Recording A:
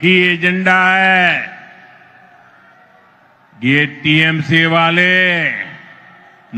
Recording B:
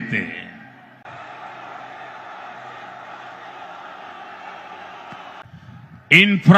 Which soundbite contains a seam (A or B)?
B